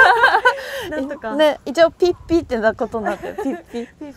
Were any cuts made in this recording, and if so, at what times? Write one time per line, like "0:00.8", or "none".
none